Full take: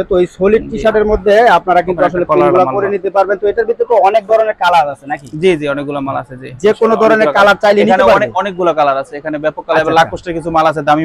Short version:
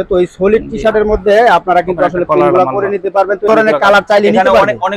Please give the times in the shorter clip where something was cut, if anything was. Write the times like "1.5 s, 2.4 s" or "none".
3.5 s